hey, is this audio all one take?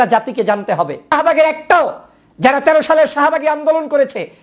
no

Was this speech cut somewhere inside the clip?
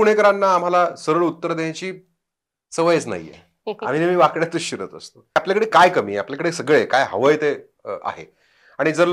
yes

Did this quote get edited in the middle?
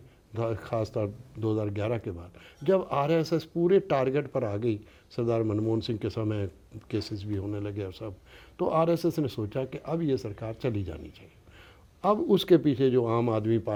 no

